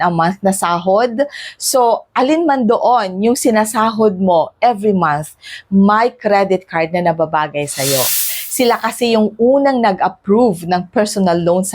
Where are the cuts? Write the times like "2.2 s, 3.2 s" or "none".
8.3 s